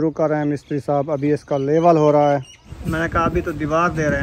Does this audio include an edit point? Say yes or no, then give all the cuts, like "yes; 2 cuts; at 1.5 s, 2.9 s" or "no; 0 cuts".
yes; 1 cut; at 2.7 s